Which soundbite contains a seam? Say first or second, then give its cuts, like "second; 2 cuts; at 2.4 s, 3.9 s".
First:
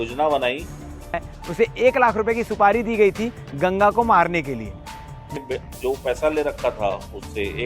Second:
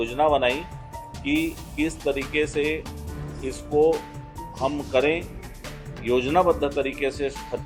first; 2 cuts; at 1.2 s, 5.3 s